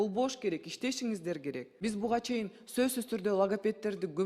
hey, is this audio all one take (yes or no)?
no